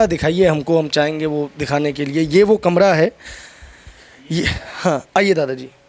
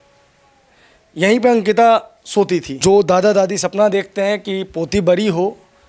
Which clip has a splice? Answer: second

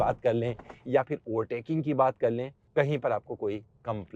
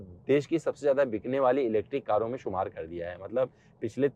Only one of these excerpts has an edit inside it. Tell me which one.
first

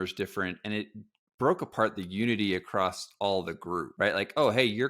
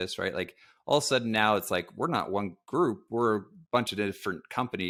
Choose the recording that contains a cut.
first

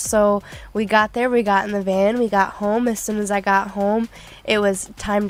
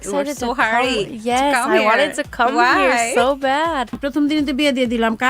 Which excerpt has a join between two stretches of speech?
second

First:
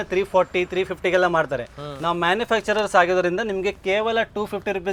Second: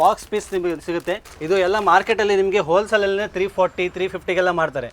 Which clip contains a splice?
second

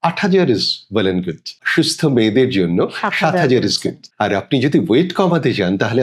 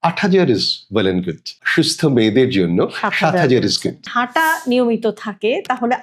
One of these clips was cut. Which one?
second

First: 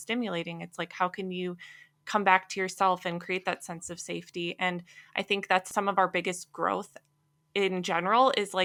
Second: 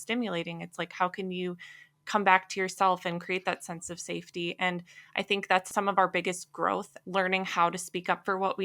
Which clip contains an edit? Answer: second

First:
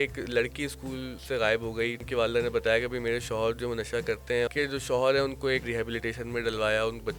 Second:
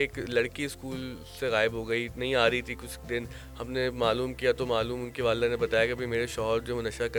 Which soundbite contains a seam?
first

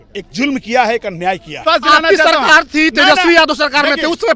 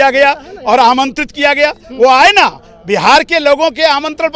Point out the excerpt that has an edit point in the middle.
first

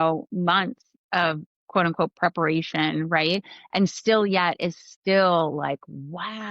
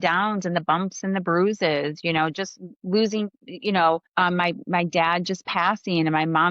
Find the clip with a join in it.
second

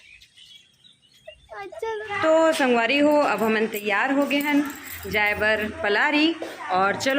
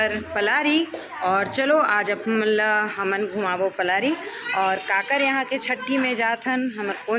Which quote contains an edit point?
first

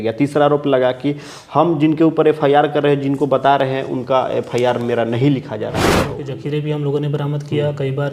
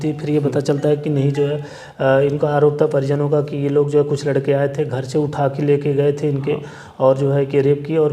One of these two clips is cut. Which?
first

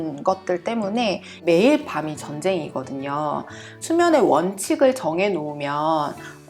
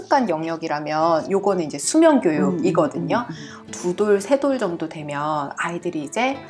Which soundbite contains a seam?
first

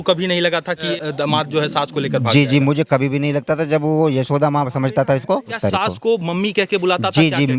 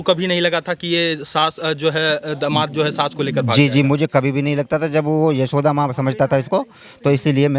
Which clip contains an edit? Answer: first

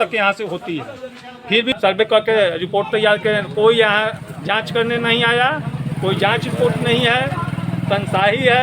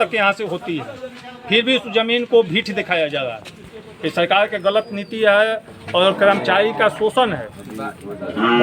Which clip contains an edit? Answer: first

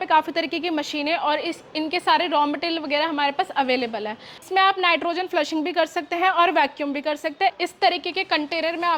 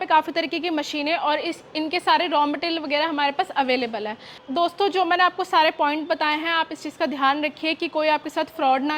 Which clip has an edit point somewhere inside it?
first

